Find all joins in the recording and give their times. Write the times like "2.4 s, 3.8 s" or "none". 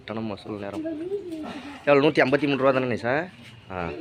none